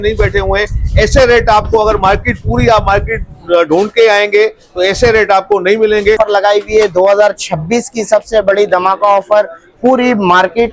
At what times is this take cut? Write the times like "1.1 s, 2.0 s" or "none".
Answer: 6.2 s

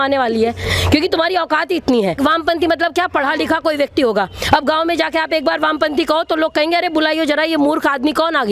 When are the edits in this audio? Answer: 2.2 s

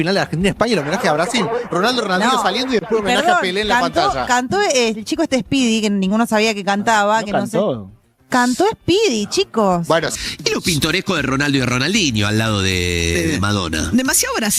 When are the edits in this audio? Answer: none

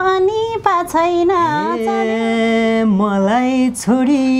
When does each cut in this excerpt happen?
1.8 s

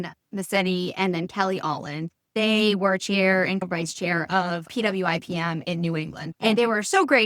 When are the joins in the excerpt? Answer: 2.3 s, 3.6 s, 6.2 s

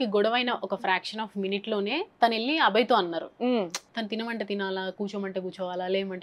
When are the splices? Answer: 3.8 s

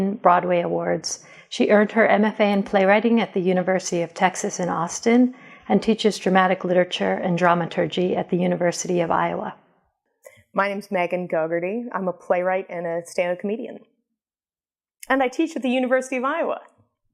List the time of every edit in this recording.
16.1 s

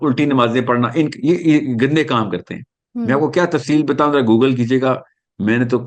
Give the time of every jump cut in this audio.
none

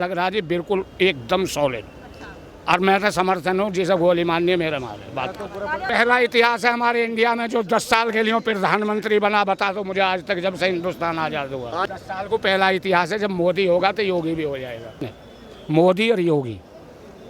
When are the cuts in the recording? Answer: 5.8 s, 11.8 s, 15.0 s

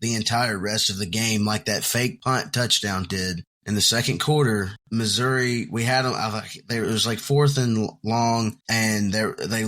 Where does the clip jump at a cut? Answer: 2.2 s, 3.5 s, 4.8 s, 8.6 s

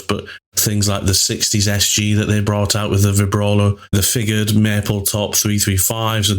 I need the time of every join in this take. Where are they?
3.9 s

